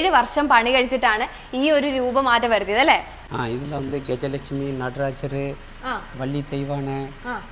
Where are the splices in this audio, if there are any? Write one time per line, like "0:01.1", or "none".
none